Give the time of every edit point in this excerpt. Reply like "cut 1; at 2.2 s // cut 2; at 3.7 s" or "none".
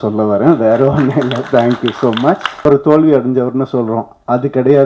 cut 1; at 2.7 s